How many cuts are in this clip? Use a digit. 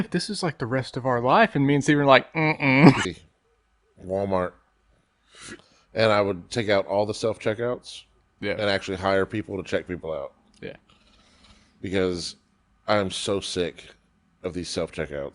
1